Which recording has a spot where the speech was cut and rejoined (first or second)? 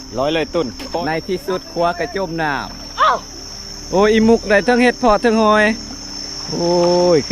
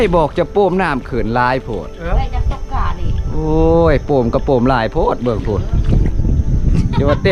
first